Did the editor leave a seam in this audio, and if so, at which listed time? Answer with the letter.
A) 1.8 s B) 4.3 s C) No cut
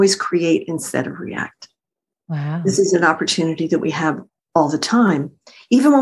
B